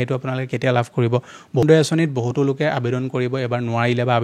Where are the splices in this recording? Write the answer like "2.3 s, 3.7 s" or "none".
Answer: 1.6 s

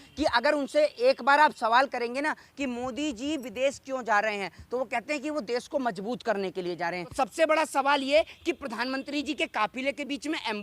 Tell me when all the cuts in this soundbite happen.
7.0 s

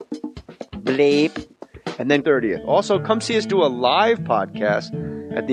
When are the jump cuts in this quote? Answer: none

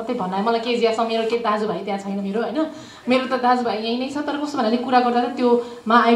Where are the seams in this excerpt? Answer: none

